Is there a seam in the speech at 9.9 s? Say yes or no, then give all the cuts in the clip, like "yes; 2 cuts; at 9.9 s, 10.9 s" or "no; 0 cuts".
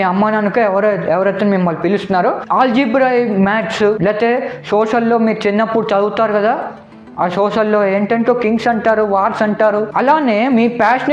yes; 2 cuts; at 2.4 s, 9.9 s